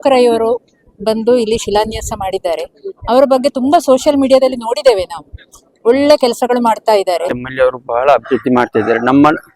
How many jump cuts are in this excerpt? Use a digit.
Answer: 1